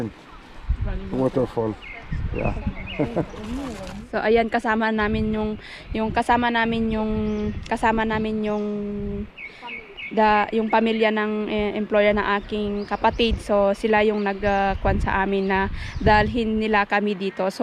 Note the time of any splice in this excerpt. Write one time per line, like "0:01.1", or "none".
0:03.9